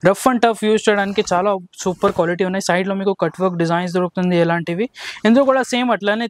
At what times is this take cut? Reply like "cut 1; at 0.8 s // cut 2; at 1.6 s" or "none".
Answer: none